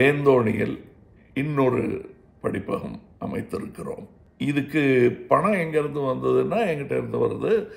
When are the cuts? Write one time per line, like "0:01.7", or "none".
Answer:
0:04.2